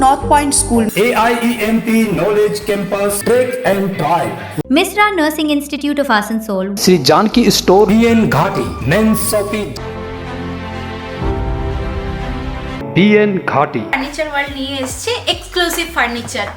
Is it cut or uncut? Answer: uncut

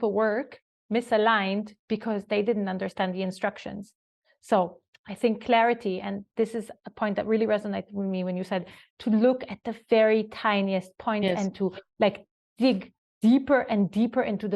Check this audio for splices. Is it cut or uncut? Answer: uncut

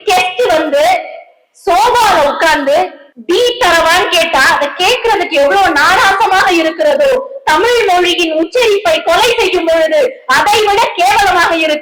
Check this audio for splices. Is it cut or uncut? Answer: uncut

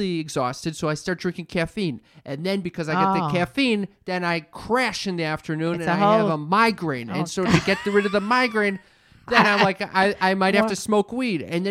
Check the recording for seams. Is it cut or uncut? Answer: uncut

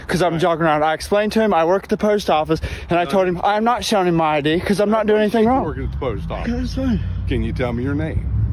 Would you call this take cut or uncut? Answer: uncut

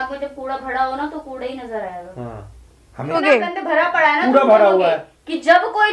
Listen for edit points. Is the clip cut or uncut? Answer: cut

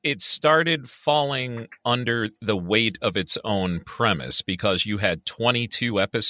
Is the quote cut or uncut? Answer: uncut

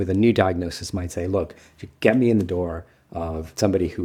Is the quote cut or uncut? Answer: uncut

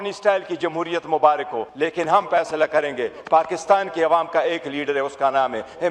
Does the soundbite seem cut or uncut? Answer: cut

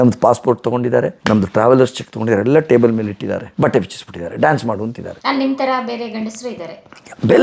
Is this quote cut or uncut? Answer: uncut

